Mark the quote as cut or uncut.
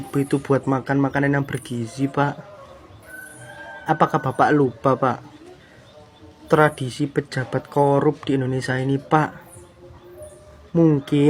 uncut